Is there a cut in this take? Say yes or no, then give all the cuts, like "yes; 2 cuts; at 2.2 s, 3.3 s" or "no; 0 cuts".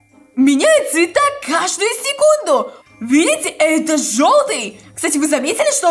yes; 2 cuts; at 2.7 s, 4.8 s